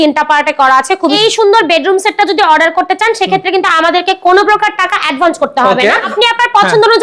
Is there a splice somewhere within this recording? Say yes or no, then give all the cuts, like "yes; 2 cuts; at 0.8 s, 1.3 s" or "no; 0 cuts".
yes; 2 cuts; at 1.1 s, 6.1 s